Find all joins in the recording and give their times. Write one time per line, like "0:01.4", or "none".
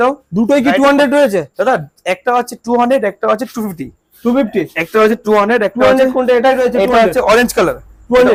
none